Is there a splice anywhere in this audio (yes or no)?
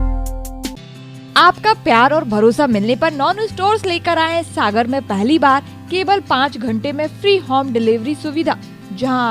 no